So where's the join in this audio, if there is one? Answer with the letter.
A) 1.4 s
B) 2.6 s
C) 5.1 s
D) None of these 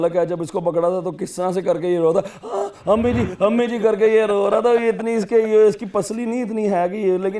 D